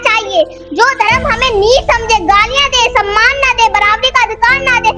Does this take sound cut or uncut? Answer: uncut